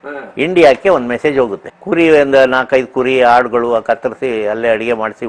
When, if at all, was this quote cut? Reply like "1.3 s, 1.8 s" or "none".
1.7 s